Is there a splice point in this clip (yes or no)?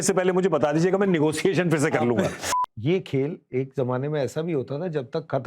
yes